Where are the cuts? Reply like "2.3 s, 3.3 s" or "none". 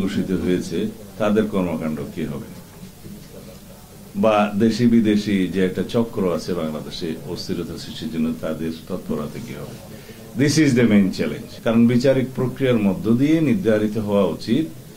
11.4 s